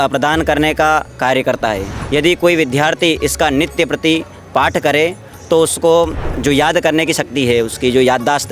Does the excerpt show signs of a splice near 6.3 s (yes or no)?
yes